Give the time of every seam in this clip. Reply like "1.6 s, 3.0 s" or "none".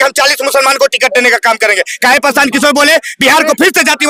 none